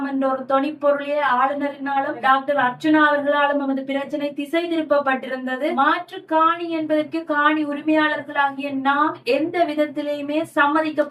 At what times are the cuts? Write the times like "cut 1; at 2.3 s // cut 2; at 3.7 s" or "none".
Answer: cut 1; at 2.2 s // cut 2; at 5.8 s